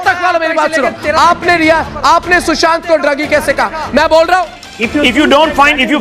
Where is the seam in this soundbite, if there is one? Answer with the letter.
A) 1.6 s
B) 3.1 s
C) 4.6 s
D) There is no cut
C